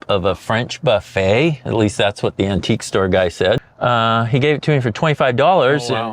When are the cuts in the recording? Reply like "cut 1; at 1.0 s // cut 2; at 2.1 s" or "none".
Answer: cut 1; at 3.7 s